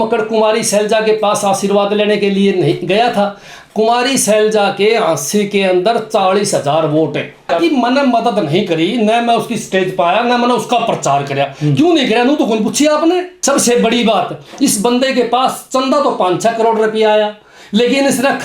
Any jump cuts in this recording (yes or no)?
yes